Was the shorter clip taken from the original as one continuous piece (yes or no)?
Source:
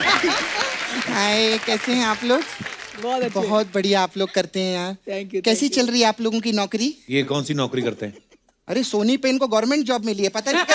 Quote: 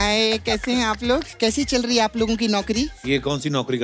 no